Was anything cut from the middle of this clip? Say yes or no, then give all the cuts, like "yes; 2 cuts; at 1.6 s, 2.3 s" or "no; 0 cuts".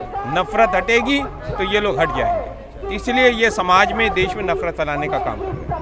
no; 0 cuts